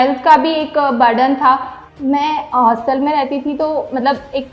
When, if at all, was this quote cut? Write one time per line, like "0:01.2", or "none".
0:01.8